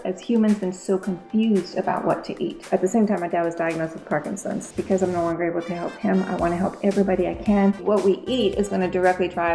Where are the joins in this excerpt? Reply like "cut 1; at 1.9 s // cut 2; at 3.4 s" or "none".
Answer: cut 1; at 2.6 s // cut 2; at 4.6 s // cut 3; at 7.8 s